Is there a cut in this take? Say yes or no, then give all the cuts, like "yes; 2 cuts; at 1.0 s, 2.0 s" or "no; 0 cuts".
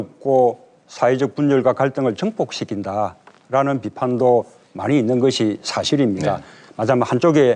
yes; 1 cut; at 3.6 s